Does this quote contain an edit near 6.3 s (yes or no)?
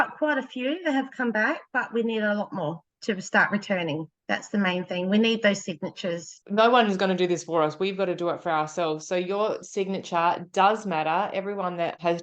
yes